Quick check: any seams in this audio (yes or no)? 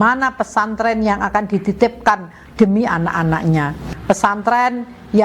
yes